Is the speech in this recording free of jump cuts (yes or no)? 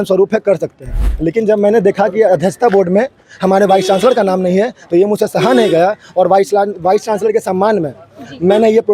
yes